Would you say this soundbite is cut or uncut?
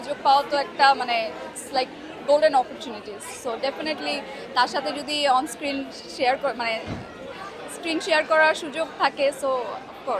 uncut